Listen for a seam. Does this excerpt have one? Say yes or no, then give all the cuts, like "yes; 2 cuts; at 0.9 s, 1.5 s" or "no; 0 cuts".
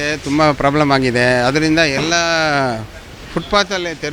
no; 0 cuts